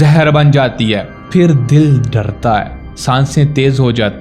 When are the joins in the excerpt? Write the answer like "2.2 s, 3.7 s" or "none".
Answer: 1.1 s